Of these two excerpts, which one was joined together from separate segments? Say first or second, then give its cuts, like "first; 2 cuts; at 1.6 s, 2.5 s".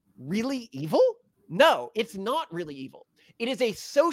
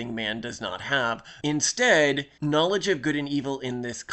second; 2 cuts; at 1.3 s, 2.3 s